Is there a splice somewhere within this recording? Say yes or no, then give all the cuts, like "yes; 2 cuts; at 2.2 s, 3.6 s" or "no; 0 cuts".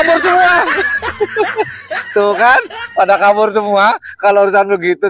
no; 0 cuts